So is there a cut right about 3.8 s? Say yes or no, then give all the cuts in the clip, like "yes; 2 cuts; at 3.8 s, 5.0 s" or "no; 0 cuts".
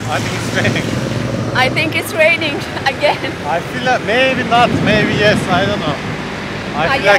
no; 0 cuts